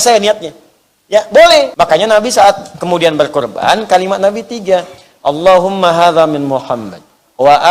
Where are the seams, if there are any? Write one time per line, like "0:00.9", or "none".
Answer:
0:01.7